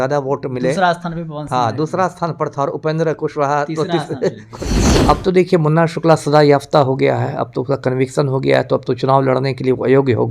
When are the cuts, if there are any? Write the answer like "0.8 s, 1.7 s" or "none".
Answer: 4.8 s